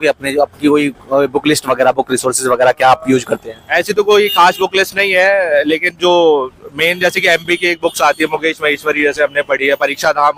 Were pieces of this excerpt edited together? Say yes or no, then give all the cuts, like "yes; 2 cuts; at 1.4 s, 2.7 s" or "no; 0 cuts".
no; 0 cuts